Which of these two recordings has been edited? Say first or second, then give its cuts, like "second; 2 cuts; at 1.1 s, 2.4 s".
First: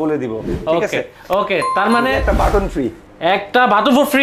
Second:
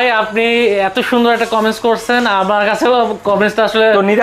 first; 1 cut; at 2.2 s